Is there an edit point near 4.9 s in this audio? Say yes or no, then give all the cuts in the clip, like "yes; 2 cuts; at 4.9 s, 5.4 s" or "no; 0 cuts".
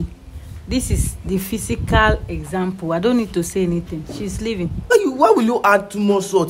yes; 1 cut; at 4.9 s